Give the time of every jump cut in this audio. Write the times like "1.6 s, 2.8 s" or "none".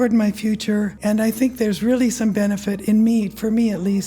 0.9 s